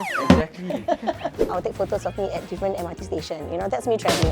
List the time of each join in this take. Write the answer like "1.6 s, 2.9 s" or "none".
1.5 s